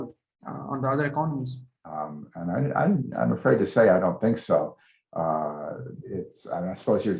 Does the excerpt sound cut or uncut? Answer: cut